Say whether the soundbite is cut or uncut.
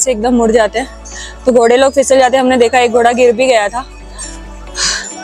uncut